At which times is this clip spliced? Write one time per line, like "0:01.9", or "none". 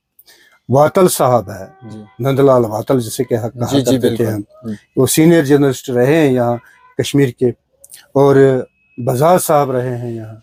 none